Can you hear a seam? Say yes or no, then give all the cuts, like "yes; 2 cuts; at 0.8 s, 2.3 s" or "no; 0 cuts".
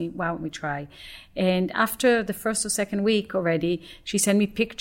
no; 0 cuts